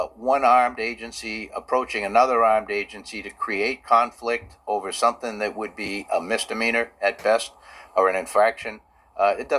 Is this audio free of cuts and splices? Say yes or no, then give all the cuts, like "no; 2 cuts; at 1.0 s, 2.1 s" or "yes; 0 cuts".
yes; 0 cuts